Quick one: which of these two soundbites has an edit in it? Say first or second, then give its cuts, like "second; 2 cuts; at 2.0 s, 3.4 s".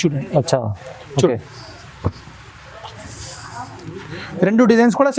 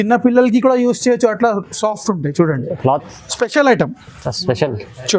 second; 1 cut; at 3.1 s